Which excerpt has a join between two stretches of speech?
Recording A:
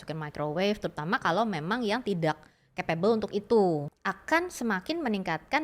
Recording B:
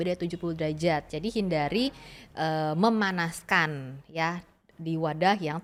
A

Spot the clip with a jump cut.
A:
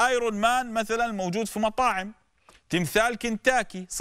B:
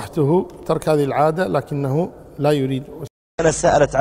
B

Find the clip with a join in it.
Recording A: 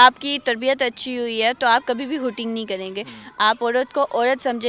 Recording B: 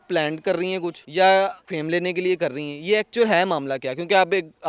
B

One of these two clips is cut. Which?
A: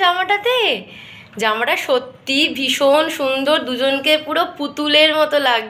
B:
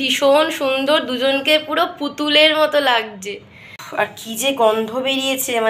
B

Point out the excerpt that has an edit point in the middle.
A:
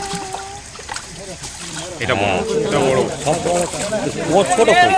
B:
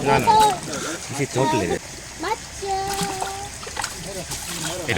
B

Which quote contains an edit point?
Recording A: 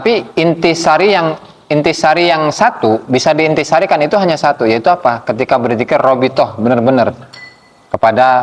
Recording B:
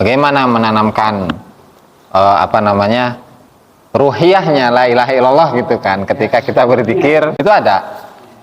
B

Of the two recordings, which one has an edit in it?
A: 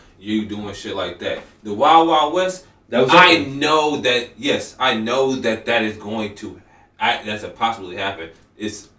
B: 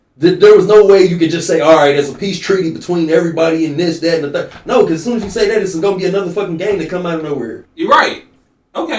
B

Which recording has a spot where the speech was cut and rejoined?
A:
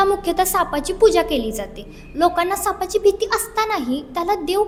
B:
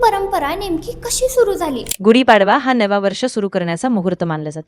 B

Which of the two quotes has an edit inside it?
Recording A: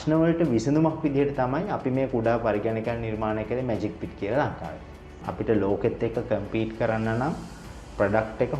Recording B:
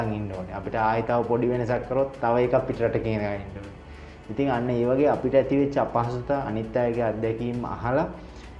A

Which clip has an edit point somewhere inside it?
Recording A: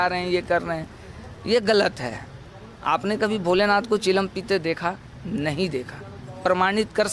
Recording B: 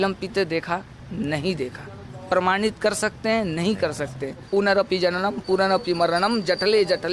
B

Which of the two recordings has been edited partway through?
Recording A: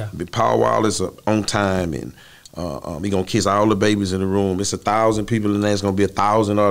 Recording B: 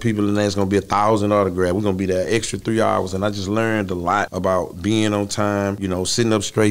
B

